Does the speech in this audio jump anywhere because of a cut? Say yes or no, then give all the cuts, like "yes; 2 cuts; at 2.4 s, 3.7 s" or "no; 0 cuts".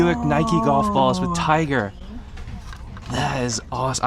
no; 0 cuts